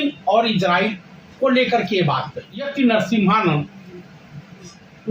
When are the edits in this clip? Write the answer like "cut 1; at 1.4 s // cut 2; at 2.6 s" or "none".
cut 1; at 2.7 s

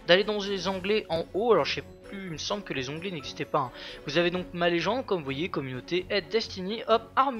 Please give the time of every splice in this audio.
cut 1; at 1.4 s

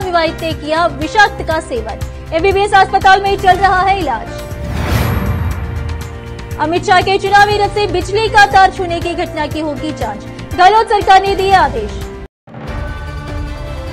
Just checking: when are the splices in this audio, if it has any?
cut 1; at 12.0 s

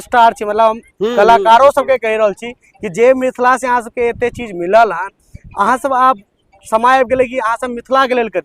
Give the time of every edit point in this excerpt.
none

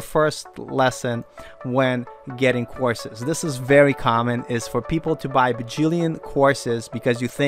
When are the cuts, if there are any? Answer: none

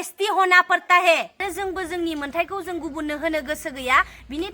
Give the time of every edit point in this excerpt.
cut 1; at 1.4 s

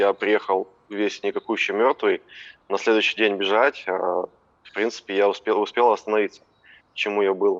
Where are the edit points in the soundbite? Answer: none

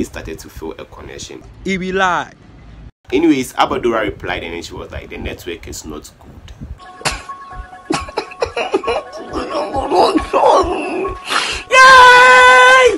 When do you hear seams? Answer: none

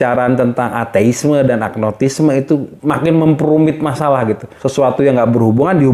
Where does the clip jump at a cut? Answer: none

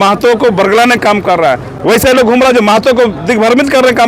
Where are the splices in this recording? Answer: none

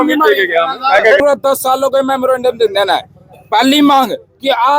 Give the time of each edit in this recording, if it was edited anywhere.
cut 1; at 1.2 s

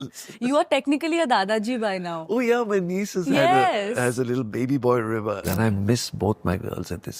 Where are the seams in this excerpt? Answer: cut 1; at 5.4 s

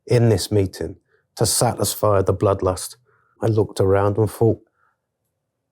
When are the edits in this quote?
cut 1; at 3.4 s

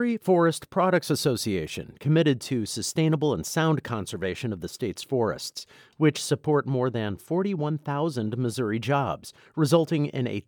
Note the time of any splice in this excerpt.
none

